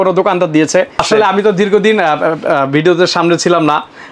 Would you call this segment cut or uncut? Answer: cut